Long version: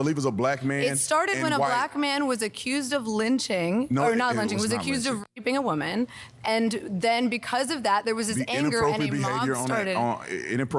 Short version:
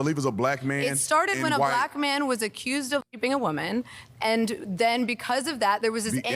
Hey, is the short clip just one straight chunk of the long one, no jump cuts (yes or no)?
no